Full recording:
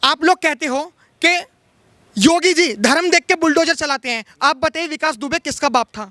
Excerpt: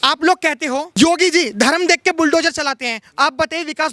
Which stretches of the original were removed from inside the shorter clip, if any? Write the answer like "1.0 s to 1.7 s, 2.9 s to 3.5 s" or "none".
0.9 s to 2.1 s